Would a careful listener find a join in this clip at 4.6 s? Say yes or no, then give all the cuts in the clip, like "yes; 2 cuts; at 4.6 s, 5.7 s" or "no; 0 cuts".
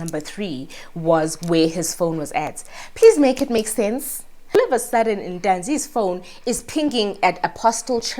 yes; 1 cut; at 4.6 s